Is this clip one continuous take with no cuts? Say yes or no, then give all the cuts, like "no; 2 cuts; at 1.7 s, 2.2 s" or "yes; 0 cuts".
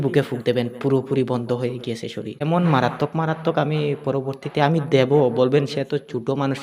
no; 1 cut; at 2.3 s